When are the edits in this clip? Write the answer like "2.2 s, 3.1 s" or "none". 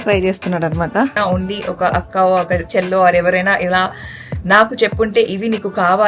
1.1 s